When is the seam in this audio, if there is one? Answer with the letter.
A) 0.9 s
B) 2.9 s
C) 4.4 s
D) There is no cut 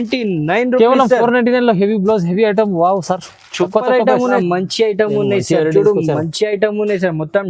C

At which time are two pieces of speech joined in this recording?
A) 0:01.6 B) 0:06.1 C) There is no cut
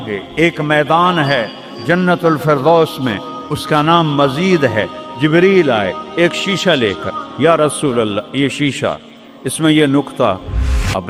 C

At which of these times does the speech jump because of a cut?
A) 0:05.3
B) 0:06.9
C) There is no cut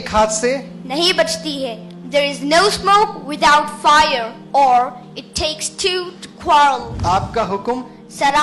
B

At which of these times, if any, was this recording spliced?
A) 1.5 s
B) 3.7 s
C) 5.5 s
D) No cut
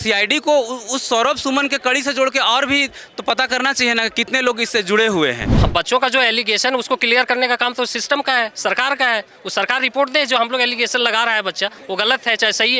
C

